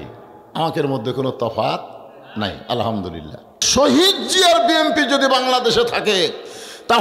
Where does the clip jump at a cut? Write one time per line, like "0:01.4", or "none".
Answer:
0:03.7